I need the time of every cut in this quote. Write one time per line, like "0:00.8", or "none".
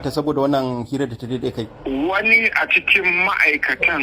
none

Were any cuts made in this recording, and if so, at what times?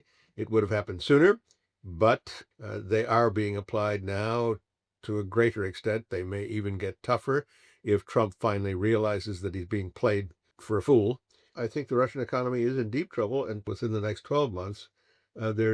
0:02.4
0:10.5
0:11.5
0:13.7

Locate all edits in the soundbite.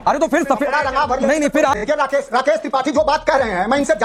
0:01.8

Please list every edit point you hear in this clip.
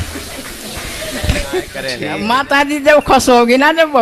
0:01.9

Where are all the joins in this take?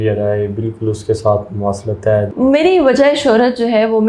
0:02.3

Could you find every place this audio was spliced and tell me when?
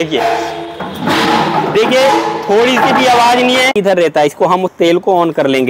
0:03.7

